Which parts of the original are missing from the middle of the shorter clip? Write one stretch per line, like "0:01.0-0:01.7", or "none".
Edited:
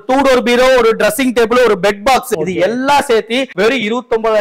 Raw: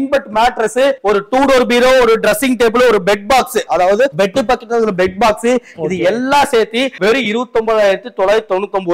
0:03.6-0:05.8